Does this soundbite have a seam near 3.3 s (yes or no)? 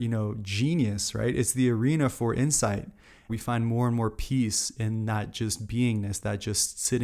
yes